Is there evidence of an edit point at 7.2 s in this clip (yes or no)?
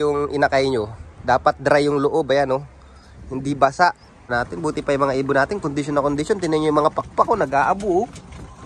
no